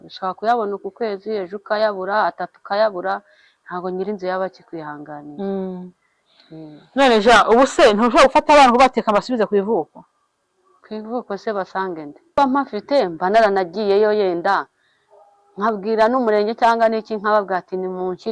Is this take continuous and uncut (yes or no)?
no